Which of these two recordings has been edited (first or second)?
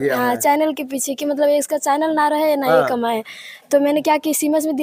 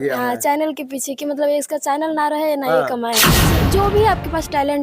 second